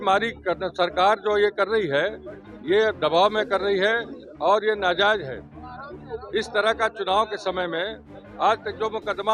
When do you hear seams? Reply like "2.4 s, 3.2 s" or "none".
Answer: none